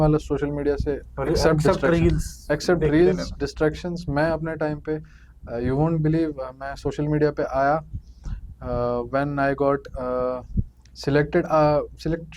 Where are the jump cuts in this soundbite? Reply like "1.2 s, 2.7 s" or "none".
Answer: none